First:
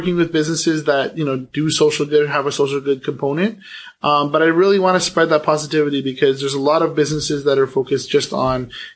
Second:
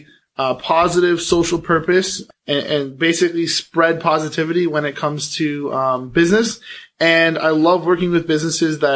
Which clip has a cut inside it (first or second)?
second